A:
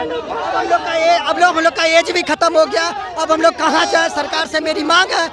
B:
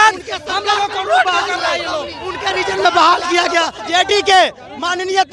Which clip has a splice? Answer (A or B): B